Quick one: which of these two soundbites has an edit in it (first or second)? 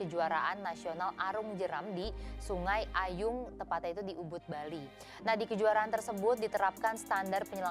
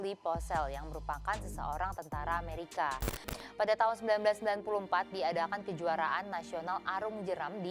second